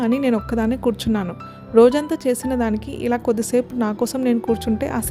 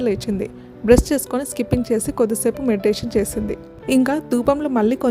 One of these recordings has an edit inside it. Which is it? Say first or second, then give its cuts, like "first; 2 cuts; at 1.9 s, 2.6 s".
second; 1 cut; at 3.7 s